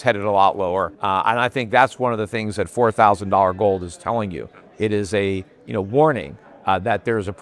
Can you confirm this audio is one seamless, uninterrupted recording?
yes; 0 cuts

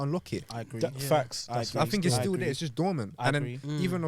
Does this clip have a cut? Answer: no; 0 cuts

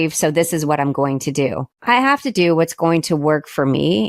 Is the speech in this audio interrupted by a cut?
yes; 1 cut; at 1.7 s

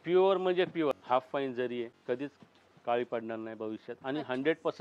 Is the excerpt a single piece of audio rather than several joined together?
no; 2 cuts; at 1.0 s, 2.0 s

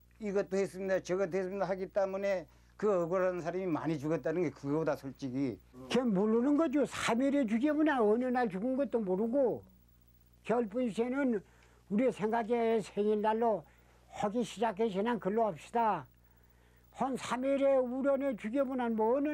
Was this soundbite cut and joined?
yes; 1 cut; at 5.7 s

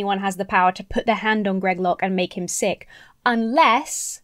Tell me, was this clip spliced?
no; 0 cuts

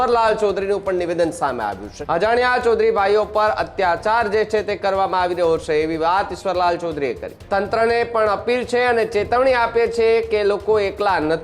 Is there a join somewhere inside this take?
yes; 2 cuts; at 1.9 s, 7.3 s

